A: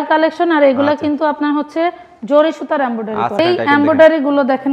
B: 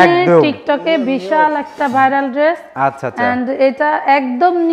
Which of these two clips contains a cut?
A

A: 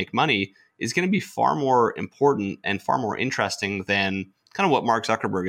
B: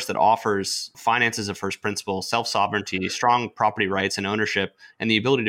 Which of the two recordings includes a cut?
B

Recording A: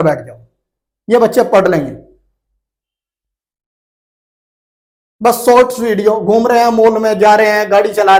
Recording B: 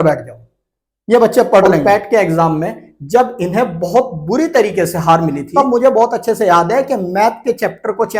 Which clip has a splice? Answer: B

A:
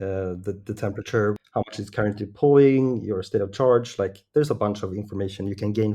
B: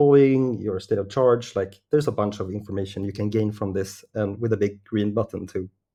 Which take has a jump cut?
A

